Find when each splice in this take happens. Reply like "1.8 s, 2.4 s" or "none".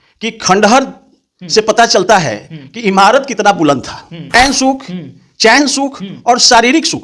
4.3 s